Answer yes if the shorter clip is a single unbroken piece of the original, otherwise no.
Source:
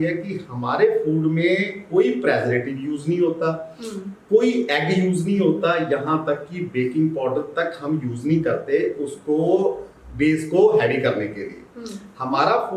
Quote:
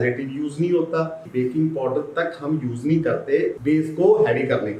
no